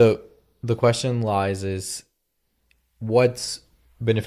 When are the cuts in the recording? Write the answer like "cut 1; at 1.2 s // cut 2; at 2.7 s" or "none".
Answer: none